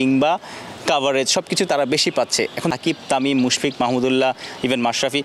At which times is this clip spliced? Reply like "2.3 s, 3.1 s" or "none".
2.8 s